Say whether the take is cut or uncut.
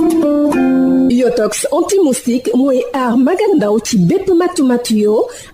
cut